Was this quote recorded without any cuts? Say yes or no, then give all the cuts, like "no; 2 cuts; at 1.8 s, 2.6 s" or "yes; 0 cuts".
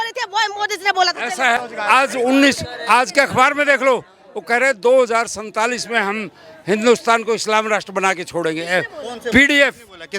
no; 1 cut; at 1.6 s